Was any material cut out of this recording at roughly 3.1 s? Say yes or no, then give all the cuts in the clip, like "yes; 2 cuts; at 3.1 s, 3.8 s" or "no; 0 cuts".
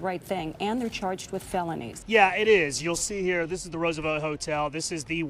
no; 1 cut; at 1.9 s